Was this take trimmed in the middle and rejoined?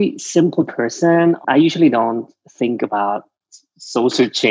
yes; 1 cut; at 1.4 s

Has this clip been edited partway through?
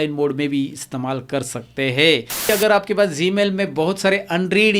yes; 1 cut; at 2.5 s

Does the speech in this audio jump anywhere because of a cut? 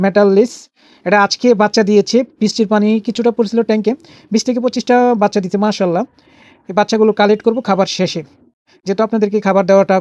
no; 0 cuts

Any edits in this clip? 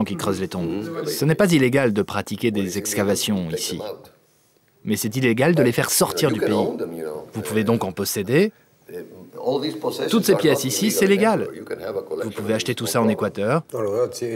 yes; 1 cut; at 0.9 s

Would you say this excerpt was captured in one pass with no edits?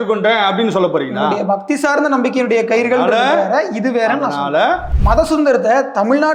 no; 1 cut; at 4.9 s

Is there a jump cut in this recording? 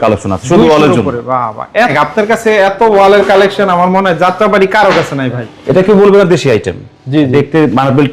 yes; 2 cuts; at 1.9 s, 5.5 s

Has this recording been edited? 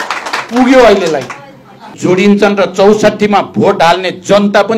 yes; 1 cut; at 1.9 s

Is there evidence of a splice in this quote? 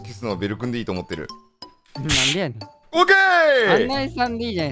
no; 0 cuts

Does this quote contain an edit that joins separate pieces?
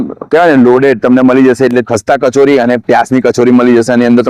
yes; 1 cut; at 1.9 s

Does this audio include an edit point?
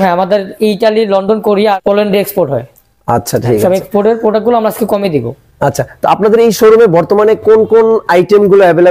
no; 0 cuts

